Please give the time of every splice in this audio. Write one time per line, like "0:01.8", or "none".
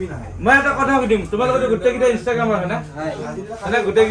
none